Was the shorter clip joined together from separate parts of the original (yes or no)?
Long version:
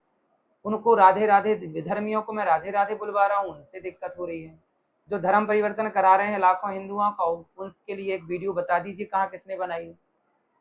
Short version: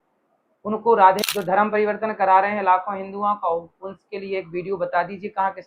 yes